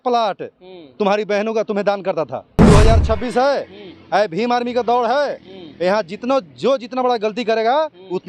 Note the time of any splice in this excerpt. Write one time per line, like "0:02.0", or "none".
0:02.6